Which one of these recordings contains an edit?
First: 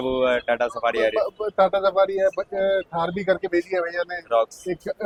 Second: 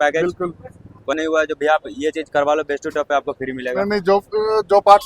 second; 1 cut; at 1.1 s

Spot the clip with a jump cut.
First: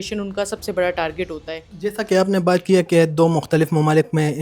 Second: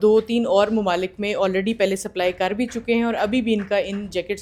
first; 1 cut; at 1.6 s

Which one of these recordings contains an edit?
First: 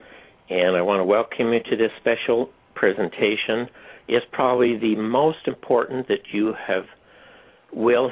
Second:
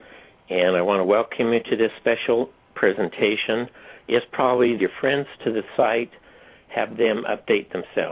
first; 1 cut; at 4.8 s

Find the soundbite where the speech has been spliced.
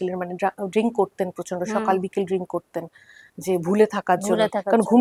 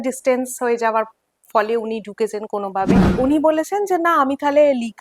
second; 1 cut; at 3.1 s

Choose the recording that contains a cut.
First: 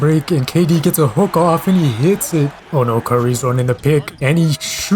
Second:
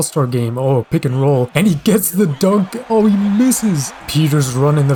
first; 1 cut; at 2.6 s

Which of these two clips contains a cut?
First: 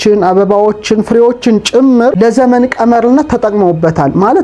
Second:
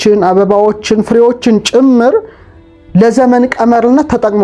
first; 1 cut; at 2.1 s

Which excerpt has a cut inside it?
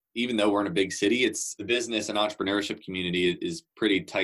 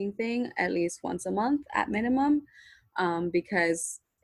first; 1 cut; at 1.5 s

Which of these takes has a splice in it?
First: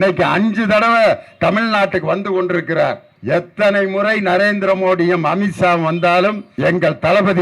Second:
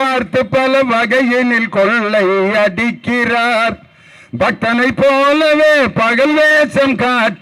first; 2 cuts; at 3.1 s, 6.5 s

